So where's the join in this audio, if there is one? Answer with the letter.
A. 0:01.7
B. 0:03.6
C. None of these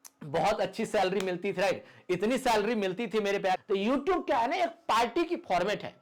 B